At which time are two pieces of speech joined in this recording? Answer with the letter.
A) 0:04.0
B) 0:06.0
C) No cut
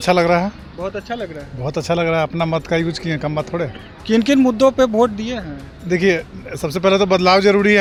C